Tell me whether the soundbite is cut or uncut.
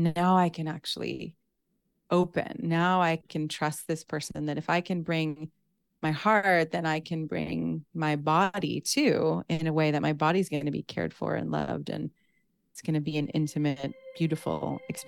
cut